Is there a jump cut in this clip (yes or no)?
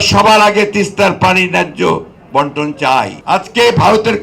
yes